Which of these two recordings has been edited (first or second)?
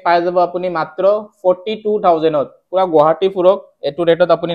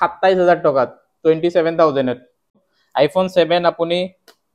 second